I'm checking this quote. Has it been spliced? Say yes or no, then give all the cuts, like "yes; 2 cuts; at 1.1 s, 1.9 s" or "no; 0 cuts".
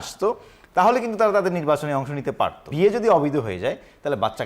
yes; 1 cut; at 2.7 s